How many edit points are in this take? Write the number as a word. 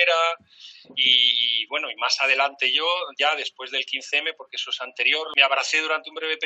one